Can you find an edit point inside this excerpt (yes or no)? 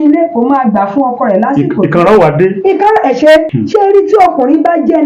yes